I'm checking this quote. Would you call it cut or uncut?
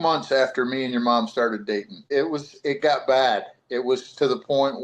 cut